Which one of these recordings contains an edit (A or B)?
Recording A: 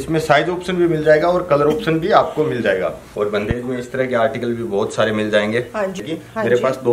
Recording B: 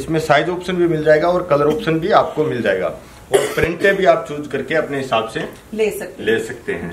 A